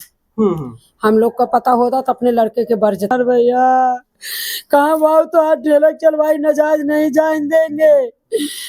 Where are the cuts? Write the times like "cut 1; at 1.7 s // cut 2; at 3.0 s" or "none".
cut 1; at 3.1 s

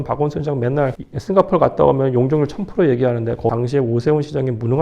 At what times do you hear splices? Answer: cut 1; at 1.1 s // cut 2; at 3.5 s

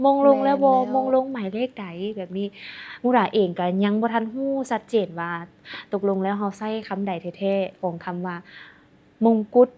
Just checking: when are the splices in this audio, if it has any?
none

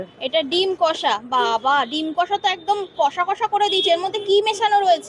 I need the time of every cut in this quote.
none

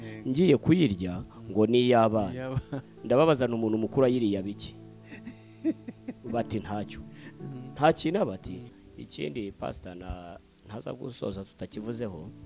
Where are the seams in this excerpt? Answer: cut 1; at 8.7 s

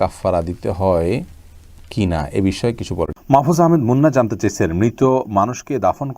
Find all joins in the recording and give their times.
cut 1; at 3.1 s

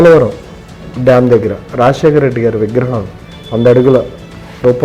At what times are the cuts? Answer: none

